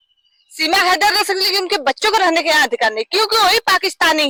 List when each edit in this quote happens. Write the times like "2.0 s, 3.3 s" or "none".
none